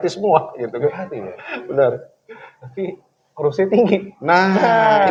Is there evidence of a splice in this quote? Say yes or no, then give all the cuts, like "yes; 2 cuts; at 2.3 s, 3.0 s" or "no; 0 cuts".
no; 0 cuts